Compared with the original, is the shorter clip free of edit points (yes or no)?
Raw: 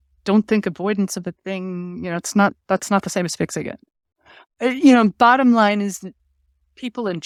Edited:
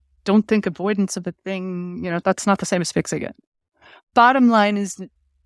no